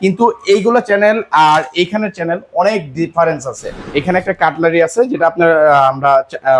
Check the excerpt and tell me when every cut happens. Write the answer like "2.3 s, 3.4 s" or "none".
3.9 s